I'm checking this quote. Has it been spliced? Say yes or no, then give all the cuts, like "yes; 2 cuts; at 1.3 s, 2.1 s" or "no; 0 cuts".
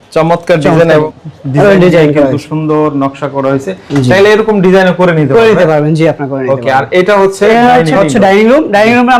no; 0 cuts